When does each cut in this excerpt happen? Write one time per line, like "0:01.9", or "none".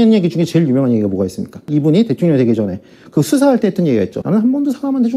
0:01.7
0:04.2